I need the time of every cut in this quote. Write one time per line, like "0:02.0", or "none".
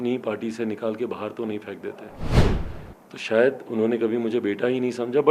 none